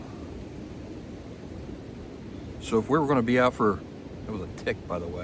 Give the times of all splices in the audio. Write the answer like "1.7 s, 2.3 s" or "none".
none